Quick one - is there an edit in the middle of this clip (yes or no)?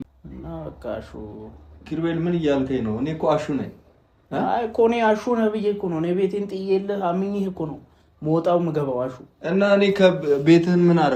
no